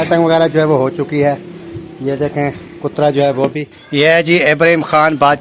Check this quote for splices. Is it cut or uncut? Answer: cut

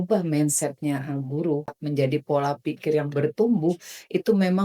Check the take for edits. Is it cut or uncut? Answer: cut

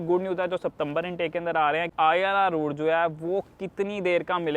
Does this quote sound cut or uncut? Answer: cut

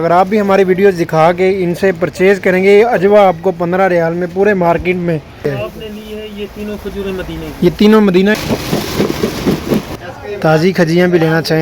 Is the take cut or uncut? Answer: cut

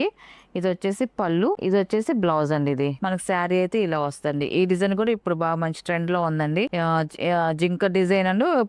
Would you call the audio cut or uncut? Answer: cut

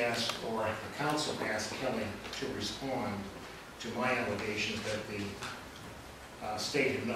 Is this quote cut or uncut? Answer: uncut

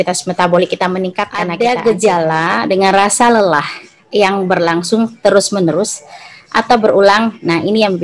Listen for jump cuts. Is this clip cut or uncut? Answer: cut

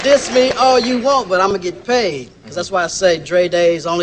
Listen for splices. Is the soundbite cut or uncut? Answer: uncut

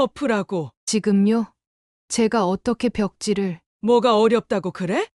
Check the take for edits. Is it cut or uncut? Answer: cut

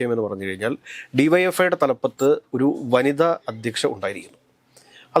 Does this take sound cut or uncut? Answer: uncut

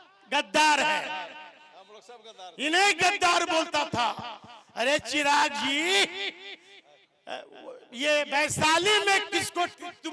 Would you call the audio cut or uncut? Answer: uncut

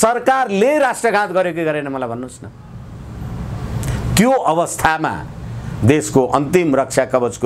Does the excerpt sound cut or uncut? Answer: uncut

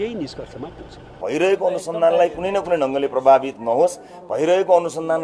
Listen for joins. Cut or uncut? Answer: cut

